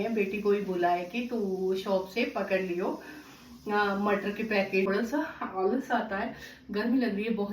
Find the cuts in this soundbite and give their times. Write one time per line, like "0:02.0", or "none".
0:04.9